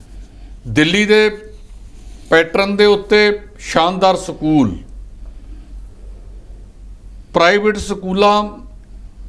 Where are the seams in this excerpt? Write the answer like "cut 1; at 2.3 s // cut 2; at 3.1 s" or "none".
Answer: none